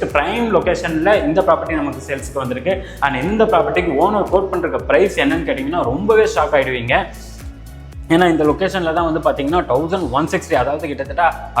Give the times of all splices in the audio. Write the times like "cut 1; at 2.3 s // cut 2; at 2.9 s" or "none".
cut 1; at 2.9 s